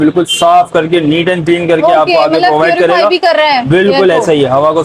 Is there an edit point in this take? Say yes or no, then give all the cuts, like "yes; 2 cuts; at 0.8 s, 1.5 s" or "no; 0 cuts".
no; 0 cuts